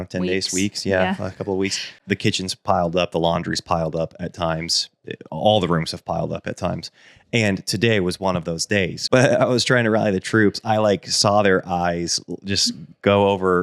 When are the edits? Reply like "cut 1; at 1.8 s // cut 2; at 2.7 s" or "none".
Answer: cut 1; at 1.9 s // cut 2; at 9.0 s

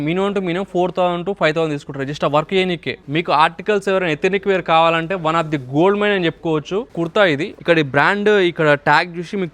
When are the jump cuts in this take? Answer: cut 1; at 3.0 s // cut 2; at 7.2 s

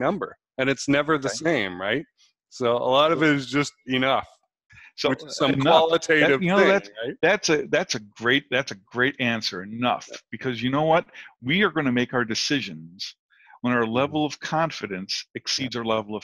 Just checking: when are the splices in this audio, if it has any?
cut 1; at 4.7 s

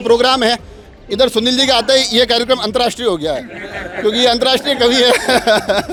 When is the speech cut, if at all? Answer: none

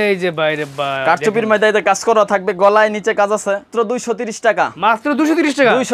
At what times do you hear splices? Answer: cut 1; at 3.7 s

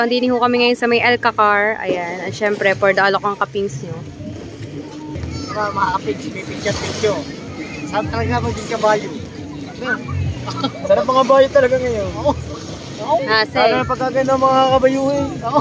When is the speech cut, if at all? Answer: cut 1; at 5.2 s

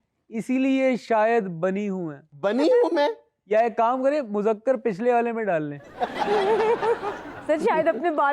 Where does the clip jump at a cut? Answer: cut 1; at 2.3 s

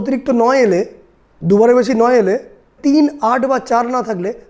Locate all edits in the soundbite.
cut 1; at 2.7 s

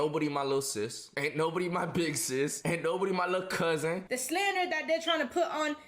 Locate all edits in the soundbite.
cut 1; at 1.0 s // cut 2; at 2.6 s // cut 3; at 4.1 s

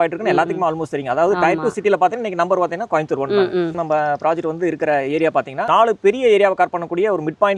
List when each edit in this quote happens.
cut 1; at 3.8 s // cut 2; at 5.7 s

